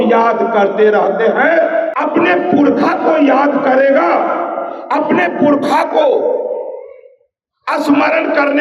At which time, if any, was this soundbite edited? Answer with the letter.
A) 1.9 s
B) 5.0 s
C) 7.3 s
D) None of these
A